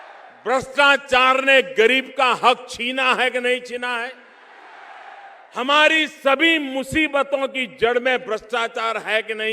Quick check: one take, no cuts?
yes; 0 cuts

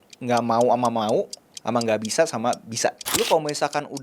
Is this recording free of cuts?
no; 1 cut; at 3.0 s

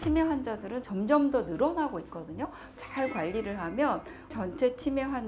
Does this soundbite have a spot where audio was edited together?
yes; 2 cuts; at 2.8 s, 4.3 s

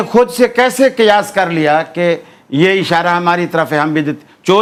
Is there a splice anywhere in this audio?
no; 0 cuts

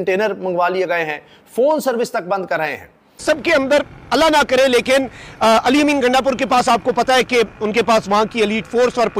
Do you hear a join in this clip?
yes; 1 cut; at 3.2 s

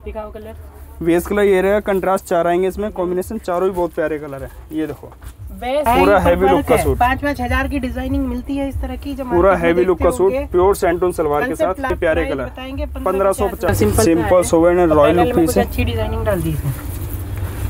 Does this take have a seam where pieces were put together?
yes; 3 cuts; at 5.9 s, 11.9 s, 13.7 s

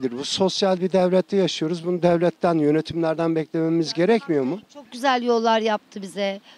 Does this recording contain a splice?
no; 0 cuts

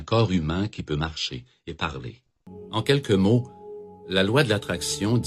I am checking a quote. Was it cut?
yes; 1 cut; at 2.9 s

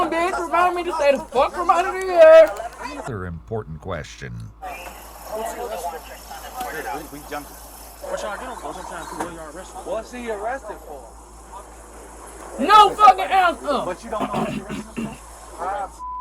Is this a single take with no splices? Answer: no; 1 cut; at 3.0 s

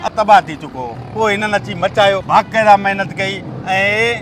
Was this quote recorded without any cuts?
no; 2 cuts; at 1.0 s, 2.2 s

